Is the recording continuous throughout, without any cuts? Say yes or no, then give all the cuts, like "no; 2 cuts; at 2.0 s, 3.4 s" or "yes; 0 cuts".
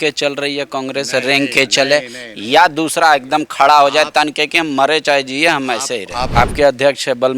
no; 1 cut; at 6.2 s